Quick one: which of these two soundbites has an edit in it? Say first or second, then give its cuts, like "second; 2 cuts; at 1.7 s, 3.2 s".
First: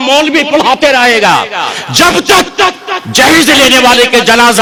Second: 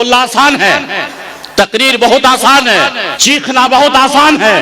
second; 1 cut; at 3.1 s